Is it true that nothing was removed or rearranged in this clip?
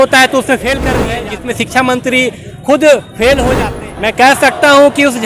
no; 2 cuts; at 1.1 s, 3.5 s

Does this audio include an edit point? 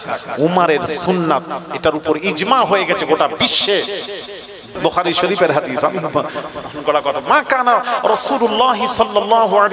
yes; 1 cut; at 4.7 s

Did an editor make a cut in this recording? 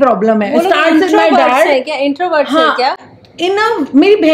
no; 0 cuts

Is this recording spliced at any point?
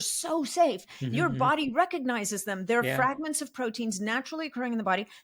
no; 0 cuts

